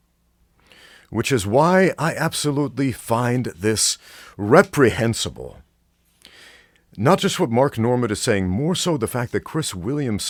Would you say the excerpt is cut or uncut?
uncut